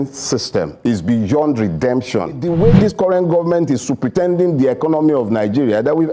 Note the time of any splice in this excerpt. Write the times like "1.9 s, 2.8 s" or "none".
2.4 s